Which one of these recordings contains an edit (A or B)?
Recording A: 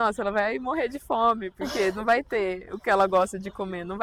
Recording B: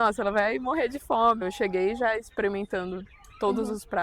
B